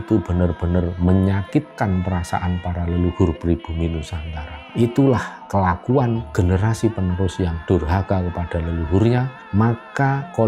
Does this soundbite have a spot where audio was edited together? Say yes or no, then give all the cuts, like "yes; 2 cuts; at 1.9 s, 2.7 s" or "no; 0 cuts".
no; 0 cuts